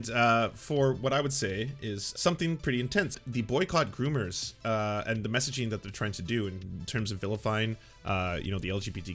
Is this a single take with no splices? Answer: no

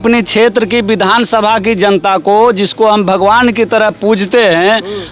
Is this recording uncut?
yes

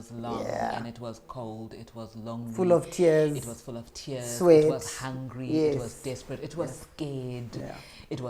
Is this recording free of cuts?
yes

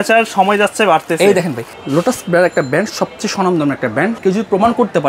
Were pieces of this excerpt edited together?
yes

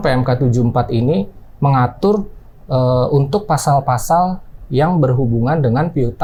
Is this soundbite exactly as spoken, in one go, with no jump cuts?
yes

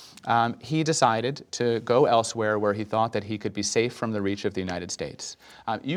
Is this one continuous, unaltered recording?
yes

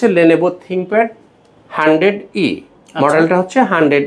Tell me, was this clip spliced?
no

